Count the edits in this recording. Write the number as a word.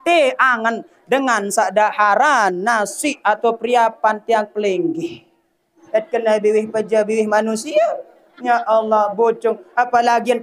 one